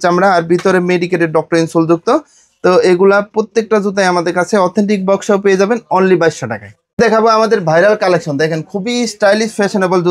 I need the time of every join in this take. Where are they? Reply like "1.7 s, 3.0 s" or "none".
none